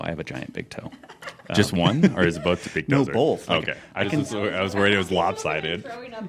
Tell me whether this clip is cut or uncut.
uncut